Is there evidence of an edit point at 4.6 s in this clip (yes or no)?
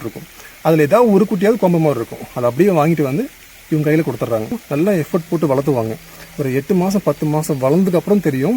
yes